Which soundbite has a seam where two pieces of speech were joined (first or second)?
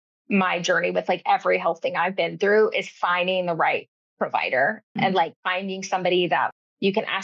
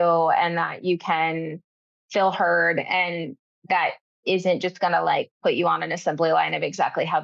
first